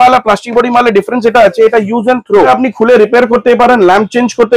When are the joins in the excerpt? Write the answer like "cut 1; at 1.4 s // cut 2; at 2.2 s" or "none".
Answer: cut 1; at 2.5 s